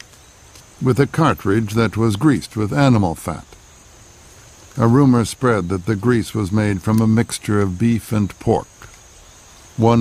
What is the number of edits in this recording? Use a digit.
1